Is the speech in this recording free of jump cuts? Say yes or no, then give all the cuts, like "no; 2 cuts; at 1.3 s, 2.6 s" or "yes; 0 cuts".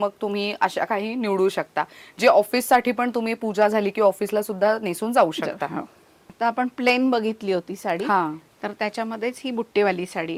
yes; 0 cuts